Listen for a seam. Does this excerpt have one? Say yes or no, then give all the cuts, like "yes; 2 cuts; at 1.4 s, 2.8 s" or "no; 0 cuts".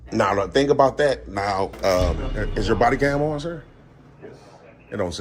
yes; 1 cut; at 2.2 s